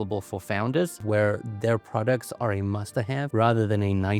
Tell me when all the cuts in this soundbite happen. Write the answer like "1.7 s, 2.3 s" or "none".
1.0 s, 3.3 s